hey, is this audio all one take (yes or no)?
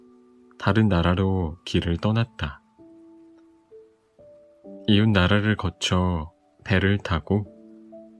no